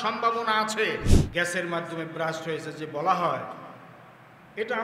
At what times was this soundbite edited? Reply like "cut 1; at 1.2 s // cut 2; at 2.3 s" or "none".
cut 1; at 1.2 s